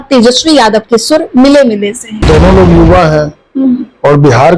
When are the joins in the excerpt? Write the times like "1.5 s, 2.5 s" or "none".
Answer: 2.3 s